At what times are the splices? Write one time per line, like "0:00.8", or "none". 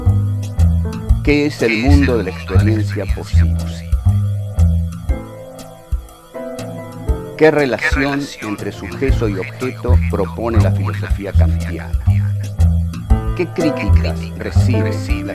0:01.0
0:14.6